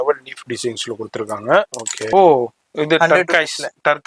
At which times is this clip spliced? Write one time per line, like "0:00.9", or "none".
0:02.0